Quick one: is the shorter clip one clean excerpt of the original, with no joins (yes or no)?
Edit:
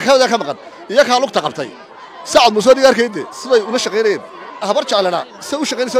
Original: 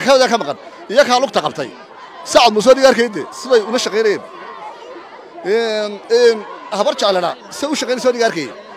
no